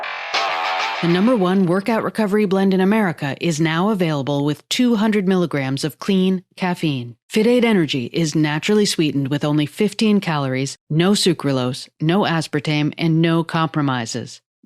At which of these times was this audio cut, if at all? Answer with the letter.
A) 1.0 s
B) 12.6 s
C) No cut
A